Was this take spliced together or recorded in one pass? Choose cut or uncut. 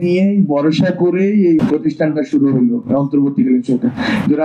uncut